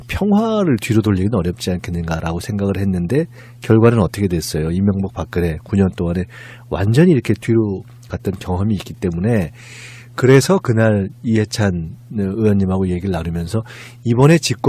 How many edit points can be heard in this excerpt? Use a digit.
0